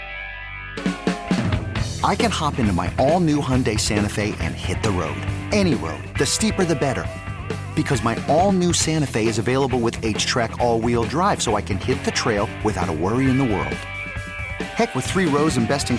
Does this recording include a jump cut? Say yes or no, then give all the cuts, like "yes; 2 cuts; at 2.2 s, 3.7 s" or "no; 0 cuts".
no; 0 cuts